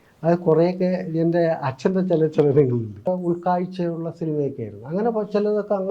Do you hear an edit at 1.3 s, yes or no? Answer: no